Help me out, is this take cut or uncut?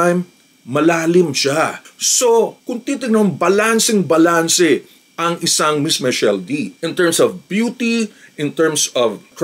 uncut